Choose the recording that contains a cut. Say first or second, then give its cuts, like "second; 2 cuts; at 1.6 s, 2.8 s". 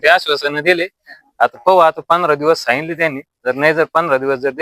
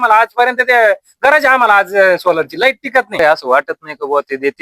second; 1 cut; at 3.2 s